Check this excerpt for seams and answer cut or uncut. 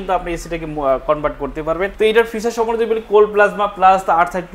cut